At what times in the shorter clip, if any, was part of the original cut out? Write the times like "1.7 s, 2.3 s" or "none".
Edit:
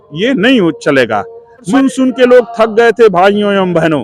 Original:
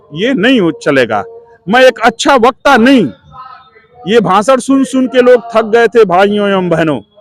1.7 s